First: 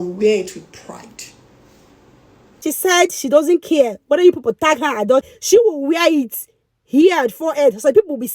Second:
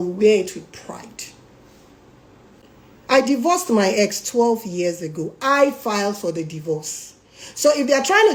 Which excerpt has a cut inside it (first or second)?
first